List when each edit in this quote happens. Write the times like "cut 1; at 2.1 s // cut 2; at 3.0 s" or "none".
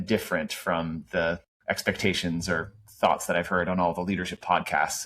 cut 1; at 1.5 s